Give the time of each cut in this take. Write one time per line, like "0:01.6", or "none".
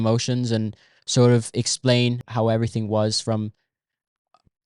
0:02.3

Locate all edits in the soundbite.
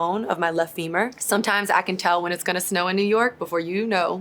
0:01.2

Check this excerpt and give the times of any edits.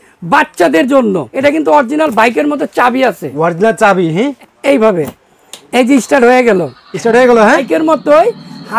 0:01.3
0:04.4
0:07.6

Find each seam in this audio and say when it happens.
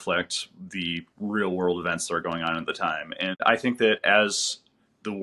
0:03.4

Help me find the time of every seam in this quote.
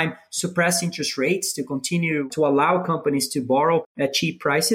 0:02.3
0:03.9

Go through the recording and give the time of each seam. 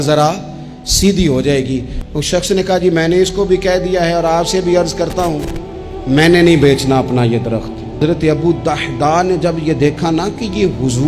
0:01.9
0:08.0

